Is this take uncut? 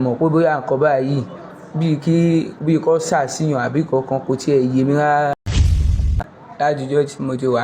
no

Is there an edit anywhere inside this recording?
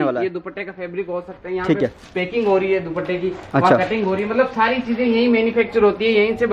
no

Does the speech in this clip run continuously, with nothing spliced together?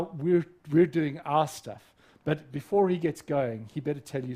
yes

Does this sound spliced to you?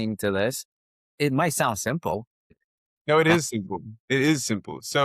yes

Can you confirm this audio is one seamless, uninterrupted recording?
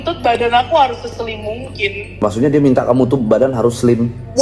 yes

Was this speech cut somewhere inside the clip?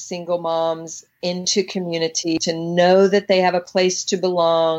yes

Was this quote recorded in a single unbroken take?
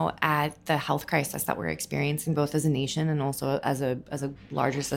yes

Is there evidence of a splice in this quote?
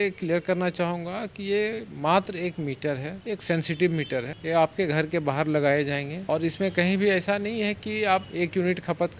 no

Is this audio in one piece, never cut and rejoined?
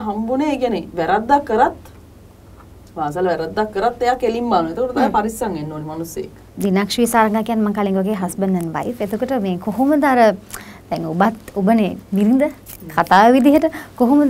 no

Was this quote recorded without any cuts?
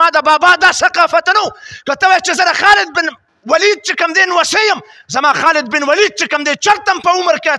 yes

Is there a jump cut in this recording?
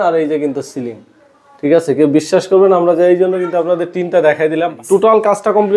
yes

